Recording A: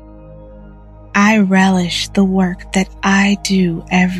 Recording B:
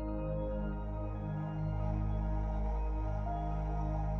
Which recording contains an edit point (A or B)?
A